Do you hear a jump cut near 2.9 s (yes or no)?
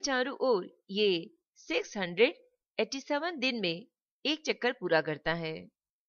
no